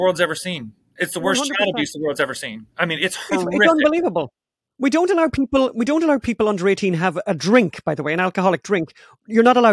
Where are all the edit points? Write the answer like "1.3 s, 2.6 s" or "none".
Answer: none